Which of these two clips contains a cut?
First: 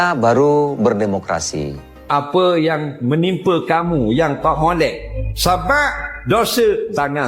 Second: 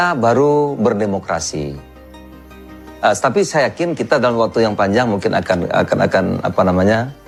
first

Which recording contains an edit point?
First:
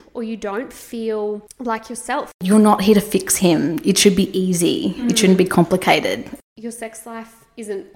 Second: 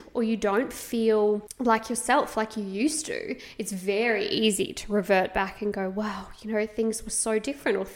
first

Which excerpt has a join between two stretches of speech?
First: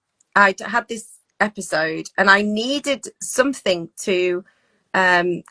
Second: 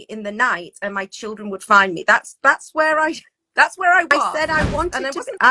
second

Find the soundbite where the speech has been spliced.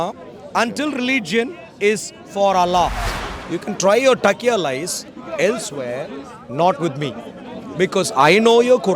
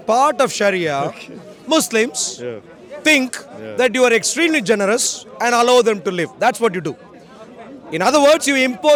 first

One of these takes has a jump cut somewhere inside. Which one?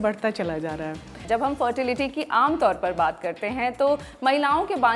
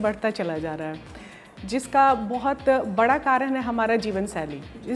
first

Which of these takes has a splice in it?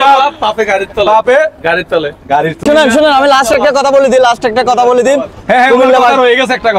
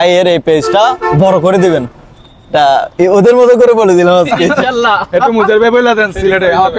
first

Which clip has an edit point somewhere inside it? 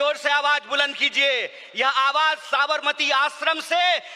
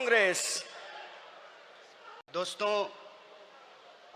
second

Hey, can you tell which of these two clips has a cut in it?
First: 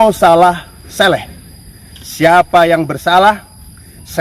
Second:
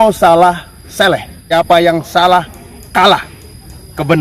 second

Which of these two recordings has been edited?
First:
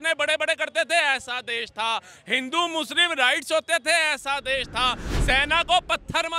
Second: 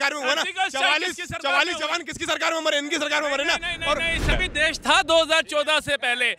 second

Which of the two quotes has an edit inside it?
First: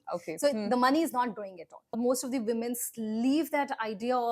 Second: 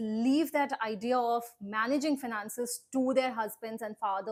first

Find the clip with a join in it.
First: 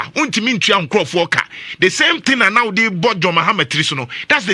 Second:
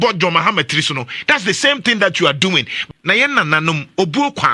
second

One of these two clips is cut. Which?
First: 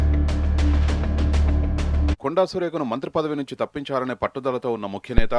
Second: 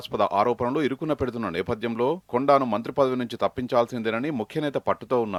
first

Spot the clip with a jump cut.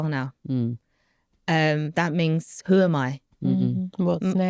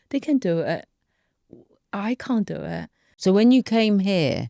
second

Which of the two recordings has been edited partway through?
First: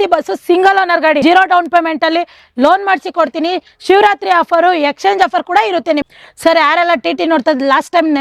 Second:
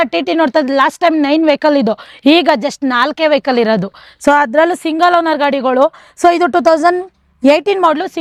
first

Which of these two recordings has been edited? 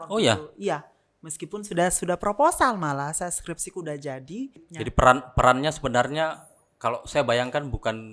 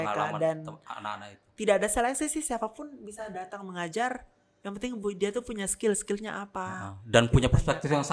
first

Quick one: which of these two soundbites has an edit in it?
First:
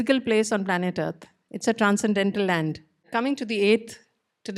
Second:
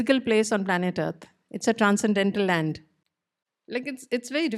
first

